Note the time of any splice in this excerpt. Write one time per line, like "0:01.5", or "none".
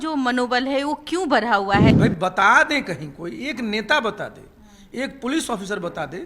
0:01.9